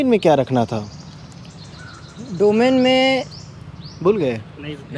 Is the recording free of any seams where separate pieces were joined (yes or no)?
yes